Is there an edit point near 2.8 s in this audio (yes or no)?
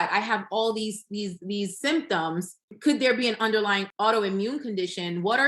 yes